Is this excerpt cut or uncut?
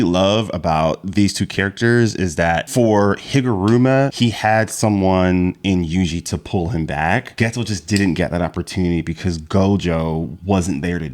cut